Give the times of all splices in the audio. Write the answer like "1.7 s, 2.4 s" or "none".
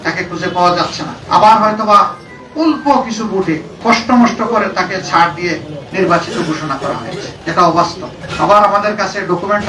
none